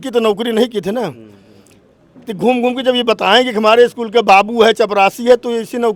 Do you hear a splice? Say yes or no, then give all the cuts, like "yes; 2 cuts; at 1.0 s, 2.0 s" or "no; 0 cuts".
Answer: no; 0 cuts